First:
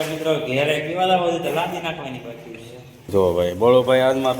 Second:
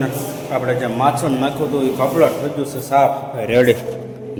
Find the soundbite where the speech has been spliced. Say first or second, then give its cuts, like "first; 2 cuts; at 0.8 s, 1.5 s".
first; 1 cut; at 3.1 s